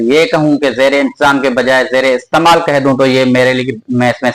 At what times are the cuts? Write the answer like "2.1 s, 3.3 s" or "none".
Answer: none

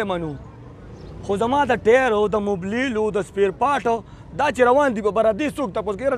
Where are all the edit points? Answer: none

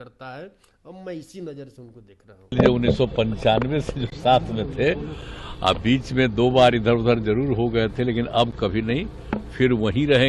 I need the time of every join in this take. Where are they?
2.3 s

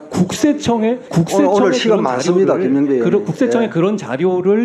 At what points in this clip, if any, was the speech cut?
1.0 s

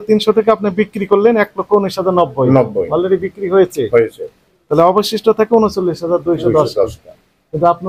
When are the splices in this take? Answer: none

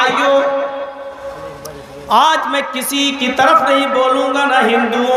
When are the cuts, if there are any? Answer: none

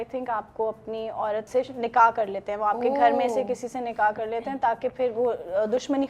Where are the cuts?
1.5 s

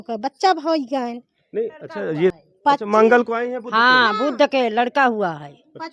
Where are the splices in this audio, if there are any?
2.3 s

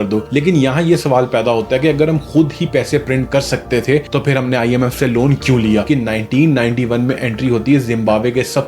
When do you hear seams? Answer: 5.9 s

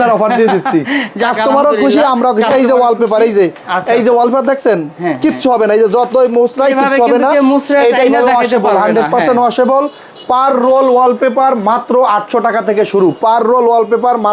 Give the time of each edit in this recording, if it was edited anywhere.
none

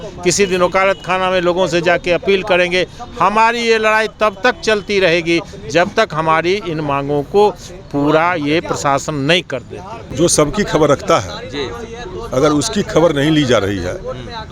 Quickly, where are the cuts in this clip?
10.0 s

